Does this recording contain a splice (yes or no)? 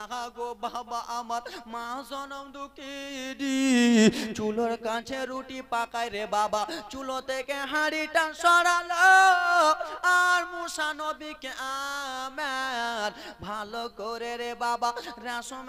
no